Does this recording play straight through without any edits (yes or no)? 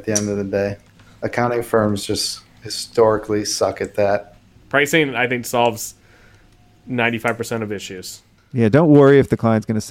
no